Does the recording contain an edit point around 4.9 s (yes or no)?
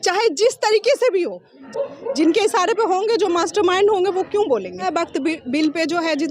yes